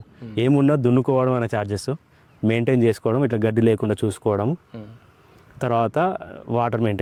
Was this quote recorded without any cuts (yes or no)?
yes